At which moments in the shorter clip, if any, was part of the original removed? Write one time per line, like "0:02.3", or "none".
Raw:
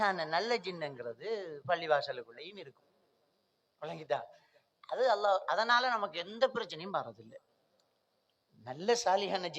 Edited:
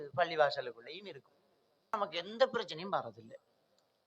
0:02.0